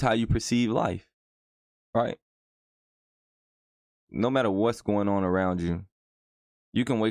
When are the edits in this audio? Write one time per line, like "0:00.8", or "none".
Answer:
none